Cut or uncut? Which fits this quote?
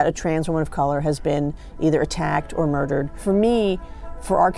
cut